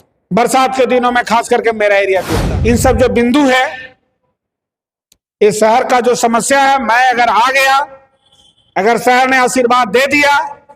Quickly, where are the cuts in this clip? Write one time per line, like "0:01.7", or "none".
0:02.4